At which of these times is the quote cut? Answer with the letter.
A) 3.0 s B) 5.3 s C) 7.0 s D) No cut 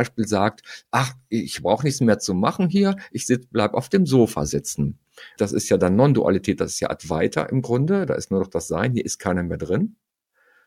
B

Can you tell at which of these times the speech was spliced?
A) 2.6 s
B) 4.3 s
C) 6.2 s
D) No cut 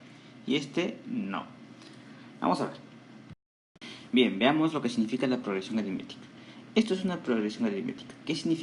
B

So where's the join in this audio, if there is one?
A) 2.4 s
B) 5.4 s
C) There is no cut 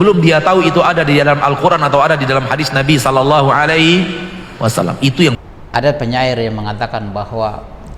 B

